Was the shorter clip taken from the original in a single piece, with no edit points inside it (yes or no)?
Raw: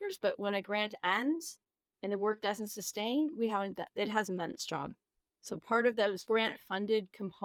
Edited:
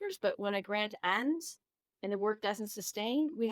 yes